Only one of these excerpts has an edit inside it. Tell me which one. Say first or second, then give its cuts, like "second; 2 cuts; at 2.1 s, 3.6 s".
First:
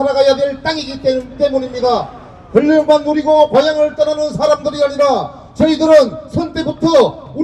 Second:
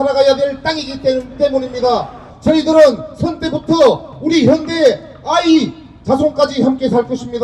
second; 1 cut; at 2.2 s